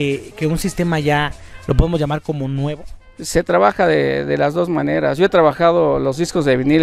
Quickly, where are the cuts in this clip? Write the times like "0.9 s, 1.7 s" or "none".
none

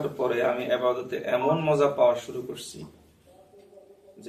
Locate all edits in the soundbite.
none

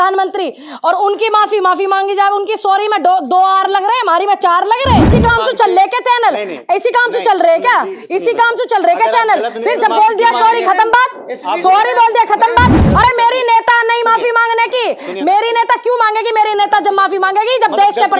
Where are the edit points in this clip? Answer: 5.1 s, 12.8 s

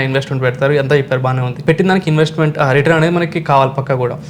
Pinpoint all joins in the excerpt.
1.6 s

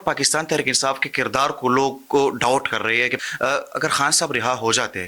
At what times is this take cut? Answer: 3.2 s

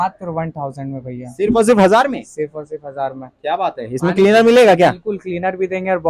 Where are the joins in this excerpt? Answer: none

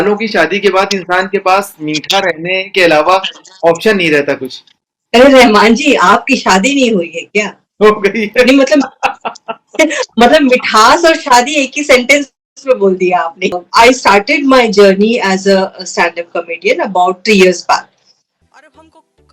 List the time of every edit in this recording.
13.6 s

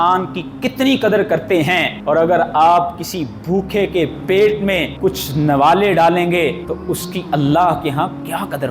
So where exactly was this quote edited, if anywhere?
1.9 s, 4.9 s, 6.7 s

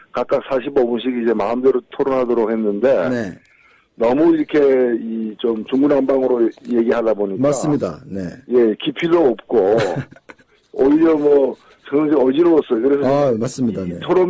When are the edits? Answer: 7.2 s

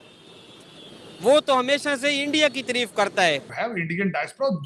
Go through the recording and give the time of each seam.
3.5 s

